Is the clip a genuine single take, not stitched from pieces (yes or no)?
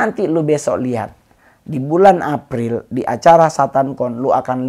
yes